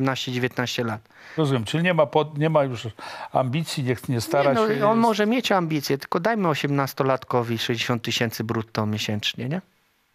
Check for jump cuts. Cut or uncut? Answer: uncut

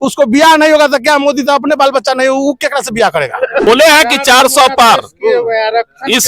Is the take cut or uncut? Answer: cut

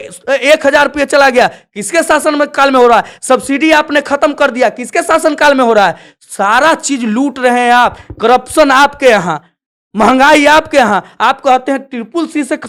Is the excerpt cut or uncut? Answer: uncut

